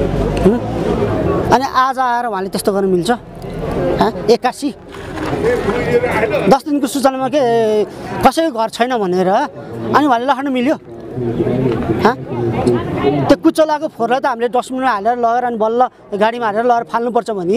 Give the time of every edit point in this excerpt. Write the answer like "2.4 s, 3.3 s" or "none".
none